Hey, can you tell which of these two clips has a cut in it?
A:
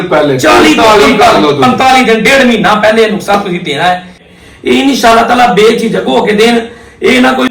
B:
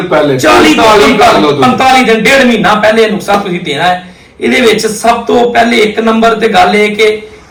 A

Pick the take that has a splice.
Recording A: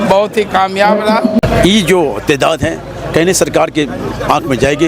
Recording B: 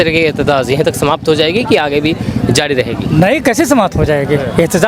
A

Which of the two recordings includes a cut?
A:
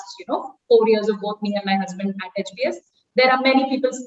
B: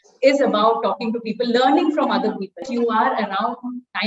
B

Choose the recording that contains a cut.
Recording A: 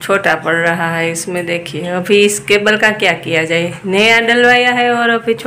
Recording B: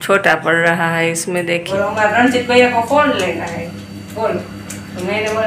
B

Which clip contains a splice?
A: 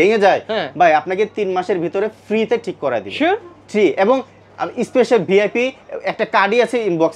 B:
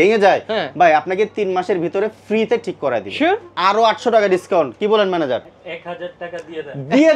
B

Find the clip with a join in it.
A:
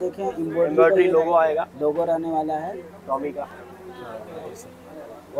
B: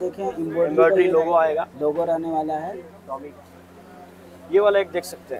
B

